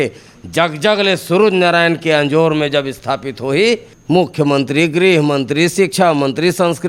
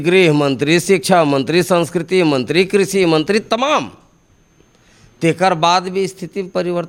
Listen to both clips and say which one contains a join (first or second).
first